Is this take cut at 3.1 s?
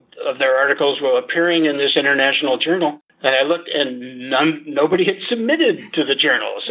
yes; 1 cut; at 3.1 s

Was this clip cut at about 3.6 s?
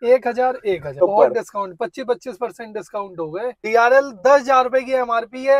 yes; 2 cuts; at 0.9 s, 3.6 s

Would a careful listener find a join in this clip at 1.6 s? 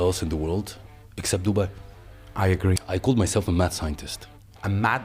no; 1 cut; at 2.8 s

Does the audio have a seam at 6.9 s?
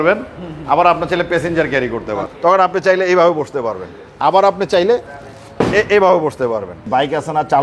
yes; 2 cuts; at 2.2 s, 6.9 s

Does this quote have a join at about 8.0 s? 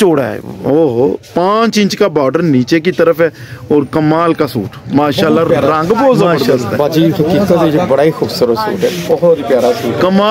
no; 1 cut; at 6.4 s

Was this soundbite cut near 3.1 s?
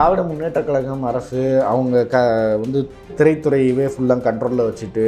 yes; 1 cut; at 3.1 s

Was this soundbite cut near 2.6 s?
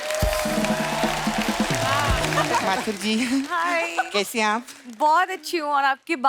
yes; 1 cut; at 2.6 s

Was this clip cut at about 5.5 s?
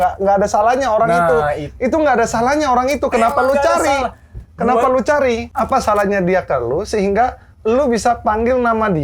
yes; 1 cut; at 5.5 s

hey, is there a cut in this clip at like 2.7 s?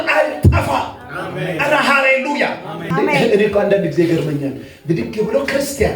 yes; 1 cut; at 2.7 s

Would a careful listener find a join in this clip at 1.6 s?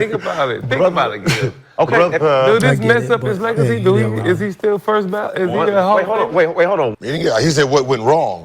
no; 1 cut; at 6.9 s

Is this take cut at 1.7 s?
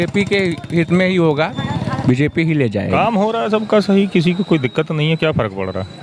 yes; 2 cuts; at 1.7 s, 2.9 s

